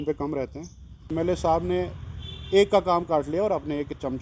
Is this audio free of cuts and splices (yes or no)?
no